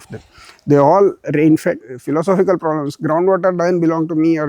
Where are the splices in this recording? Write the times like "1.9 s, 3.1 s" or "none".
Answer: 1.9 s